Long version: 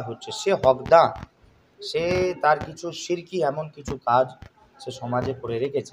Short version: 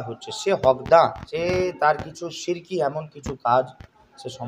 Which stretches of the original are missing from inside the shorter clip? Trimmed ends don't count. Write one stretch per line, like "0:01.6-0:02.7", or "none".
0:01.2-0:01.9